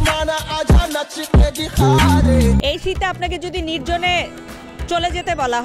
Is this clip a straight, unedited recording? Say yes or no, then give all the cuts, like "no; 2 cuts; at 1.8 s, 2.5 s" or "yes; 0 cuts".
no; 1 cut; at 2.6 s